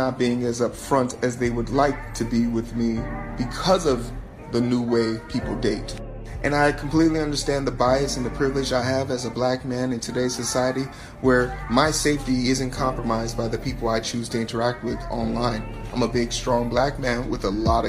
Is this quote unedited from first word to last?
yes; 0 cuts

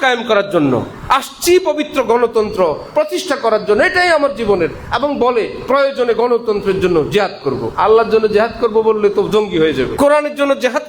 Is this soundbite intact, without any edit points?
no; 2 cuts; at 7.7 s, 9.9 s

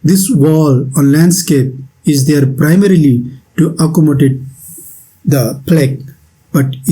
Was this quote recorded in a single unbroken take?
yes; 0 cuts

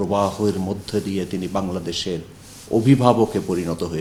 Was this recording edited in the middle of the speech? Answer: no; 0 cuts

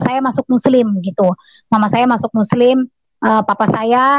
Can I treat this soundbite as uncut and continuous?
yes; 0 cuts

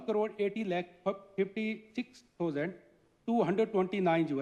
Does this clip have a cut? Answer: no; 0 cuts

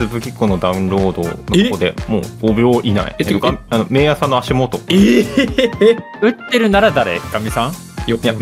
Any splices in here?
yes; 5 cuts; at 1.4 s, 2.3 s, 3.1 s, 4.8 s, 6.1 s

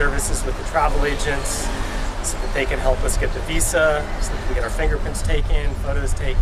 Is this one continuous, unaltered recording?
yes; 0 cuts

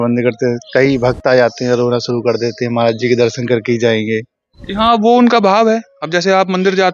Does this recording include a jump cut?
no; 0 cuts

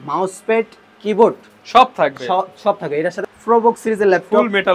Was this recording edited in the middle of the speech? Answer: yes; 1 cut; at 3.2 s

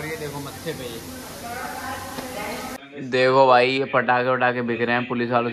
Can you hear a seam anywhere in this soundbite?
yes; 1 cut; at 2.8 s

